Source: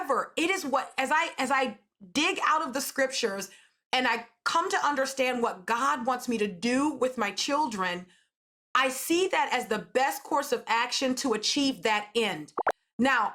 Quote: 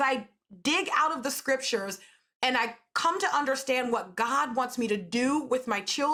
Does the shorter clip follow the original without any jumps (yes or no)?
yes